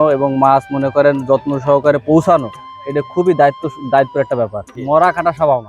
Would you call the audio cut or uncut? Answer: cut